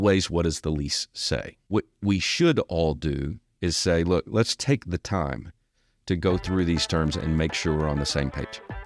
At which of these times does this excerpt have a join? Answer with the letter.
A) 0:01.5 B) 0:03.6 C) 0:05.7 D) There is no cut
A